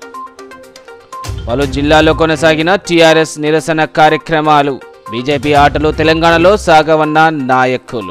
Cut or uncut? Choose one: uncut